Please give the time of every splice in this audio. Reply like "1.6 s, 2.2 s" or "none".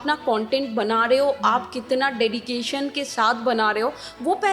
none